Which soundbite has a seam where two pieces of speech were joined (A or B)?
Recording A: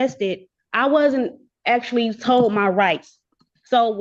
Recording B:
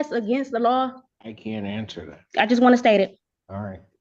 B